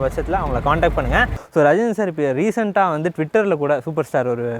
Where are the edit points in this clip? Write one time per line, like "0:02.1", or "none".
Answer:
0:01.4